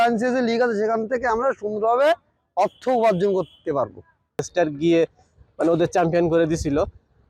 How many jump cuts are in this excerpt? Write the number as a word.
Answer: one